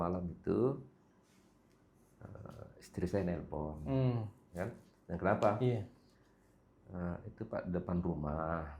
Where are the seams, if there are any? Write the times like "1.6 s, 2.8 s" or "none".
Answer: 4.4 s